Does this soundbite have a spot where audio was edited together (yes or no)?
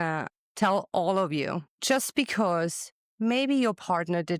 yes